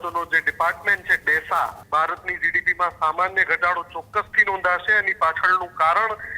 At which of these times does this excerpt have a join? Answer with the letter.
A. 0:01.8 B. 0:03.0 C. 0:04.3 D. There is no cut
A